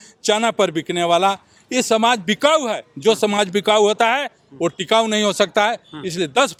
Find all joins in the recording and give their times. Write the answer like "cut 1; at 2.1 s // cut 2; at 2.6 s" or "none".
none